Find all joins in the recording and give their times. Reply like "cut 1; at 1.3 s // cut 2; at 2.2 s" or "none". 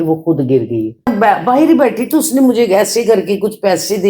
cut 1; at 1.1 s